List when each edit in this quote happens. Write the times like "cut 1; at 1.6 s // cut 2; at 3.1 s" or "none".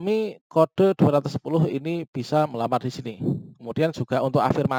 none